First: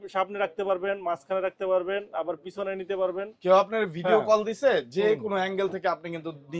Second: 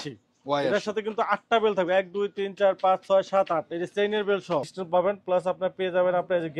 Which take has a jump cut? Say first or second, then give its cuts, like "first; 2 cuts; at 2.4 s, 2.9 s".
second; 1 cut; at 4.8 s